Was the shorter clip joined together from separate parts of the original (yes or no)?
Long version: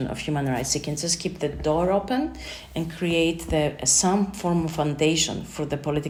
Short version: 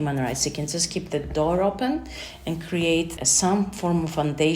yes